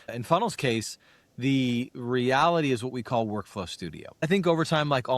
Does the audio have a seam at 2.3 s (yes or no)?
no